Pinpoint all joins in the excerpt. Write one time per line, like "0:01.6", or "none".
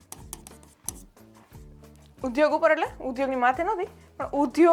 none

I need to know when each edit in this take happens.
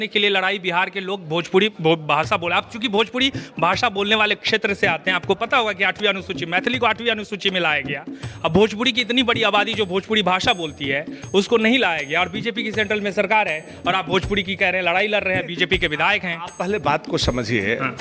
none

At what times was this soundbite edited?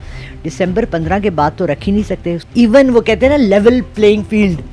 0:02.4

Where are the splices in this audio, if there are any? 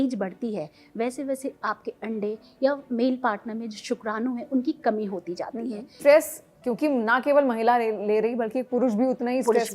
0:06.0

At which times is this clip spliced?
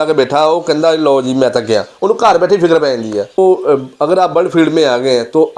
0:03.4

